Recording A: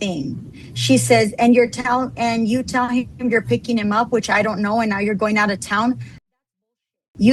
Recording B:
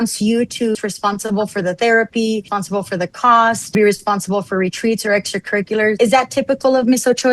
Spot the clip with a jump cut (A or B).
B